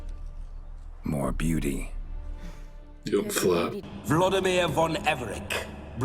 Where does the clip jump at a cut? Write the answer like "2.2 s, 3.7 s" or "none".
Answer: 3.9 s

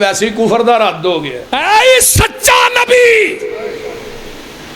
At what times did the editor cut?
1.4 s

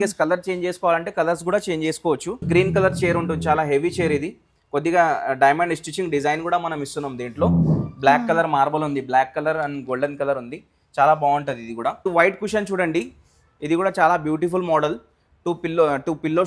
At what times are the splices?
2.4 s, 12.0 s

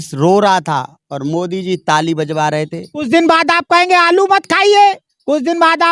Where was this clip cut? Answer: 3.0 s

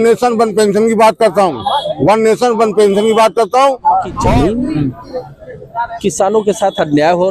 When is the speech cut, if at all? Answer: 4.2 s

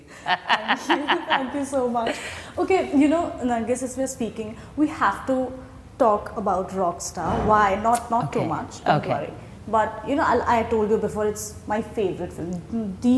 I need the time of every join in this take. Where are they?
none

